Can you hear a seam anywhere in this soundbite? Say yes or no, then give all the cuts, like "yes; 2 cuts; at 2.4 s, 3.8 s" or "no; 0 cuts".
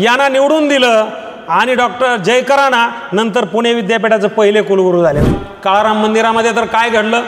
yes; 1 cut; at 5.2 s